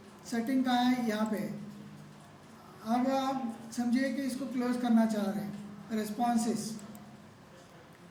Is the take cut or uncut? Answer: uncut